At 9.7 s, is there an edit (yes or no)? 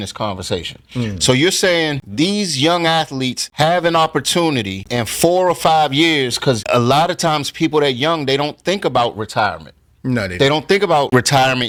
no